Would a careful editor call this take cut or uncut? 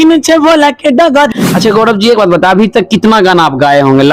cut